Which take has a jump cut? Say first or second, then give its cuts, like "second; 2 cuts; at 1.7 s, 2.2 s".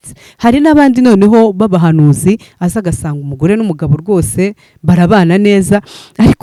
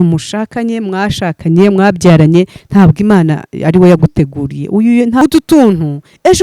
second; 1 cut; at 5.2 s